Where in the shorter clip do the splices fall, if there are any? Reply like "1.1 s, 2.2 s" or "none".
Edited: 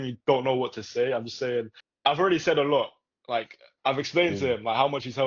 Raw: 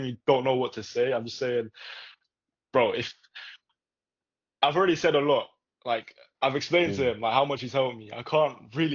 1.8 s